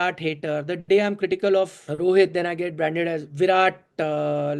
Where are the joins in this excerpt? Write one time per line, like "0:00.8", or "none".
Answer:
0:01.8
0:03.3

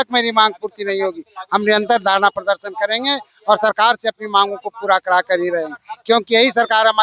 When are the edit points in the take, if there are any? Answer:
none

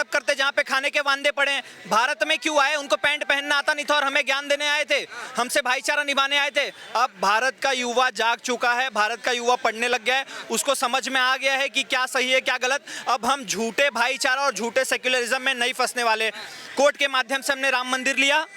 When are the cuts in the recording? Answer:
none

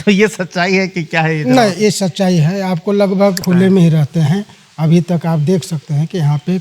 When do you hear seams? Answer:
0:03.4

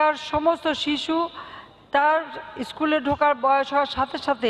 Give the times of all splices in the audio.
none

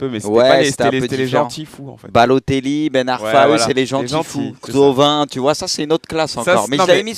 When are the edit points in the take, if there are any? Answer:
0:05.3

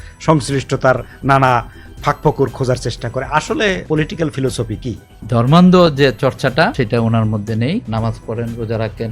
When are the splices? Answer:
0:03.8
0:05.1
0:06.7
0:07.9

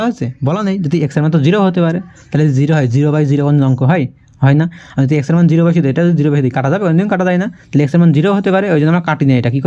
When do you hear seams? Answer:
none

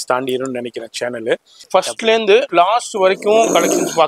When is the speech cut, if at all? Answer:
0:01.5

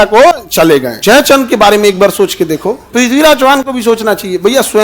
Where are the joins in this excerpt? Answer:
0:00.9
0:02.8

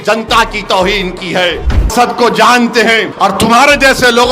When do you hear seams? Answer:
0:01.9
0:03.1

